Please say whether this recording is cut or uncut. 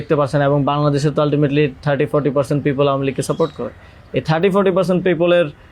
uncut